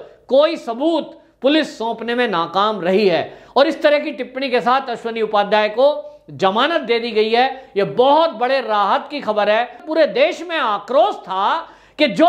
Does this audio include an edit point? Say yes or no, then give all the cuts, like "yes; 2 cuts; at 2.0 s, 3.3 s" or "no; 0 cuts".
yes; 1 cut; at 9.8 s